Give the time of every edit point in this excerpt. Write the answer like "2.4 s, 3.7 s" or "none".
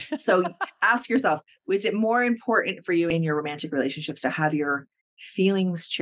3.1 s